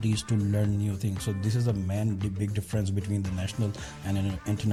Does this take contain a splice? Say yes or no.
no